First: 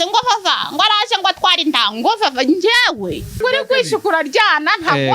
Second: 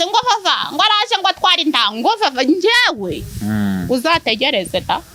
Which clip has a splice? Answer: first; 1 cut; at 3.4 s

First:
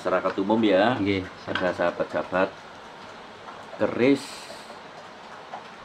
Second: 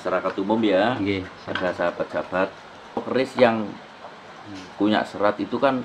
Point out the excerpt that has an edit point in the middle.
second; 1 cut; at 3.0 s

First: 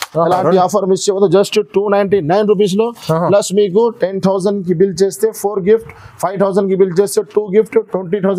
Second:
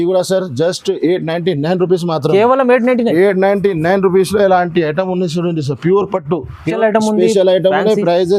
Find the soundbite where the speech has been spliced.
second; 1 cut; at 6.6 s

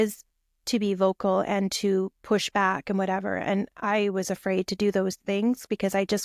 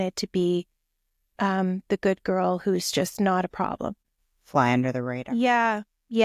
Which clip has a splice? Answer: second; 1 cut; at 4.0 s

